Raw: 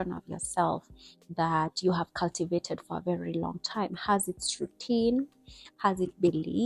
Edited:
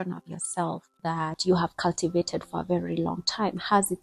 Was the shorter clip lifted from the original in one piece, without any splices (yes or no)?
no